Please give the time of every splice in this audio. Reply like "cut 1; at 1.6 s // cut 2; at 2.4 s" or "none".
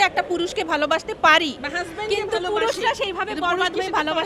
none